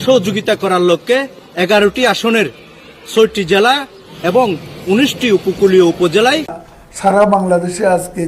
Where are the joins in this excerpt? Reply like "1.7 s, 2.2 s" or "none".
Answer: 6.6 s

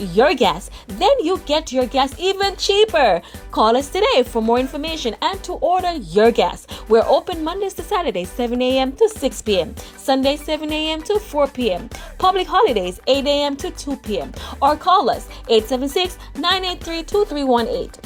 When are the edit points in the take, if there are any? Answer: none

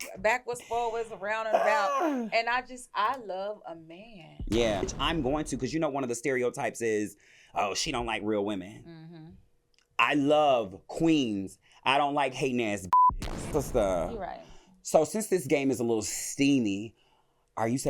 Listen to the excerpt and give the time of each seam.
4.9 s, 12.8 s

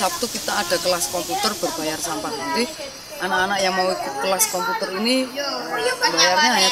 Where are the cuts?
none

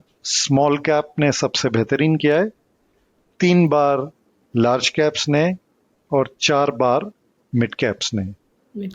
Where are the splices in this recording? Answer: none

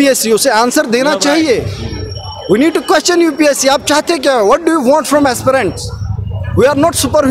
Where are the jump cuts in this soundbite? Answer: none

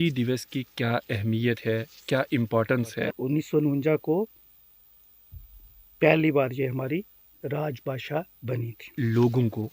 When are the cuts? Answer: 3.1 s, 8.9 s

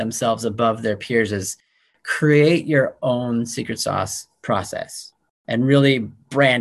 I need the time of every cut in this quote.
5.4 s

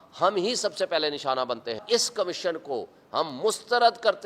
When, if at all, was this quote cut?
1.8 s

